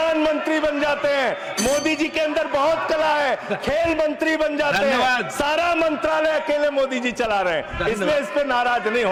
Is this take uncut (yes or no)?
yes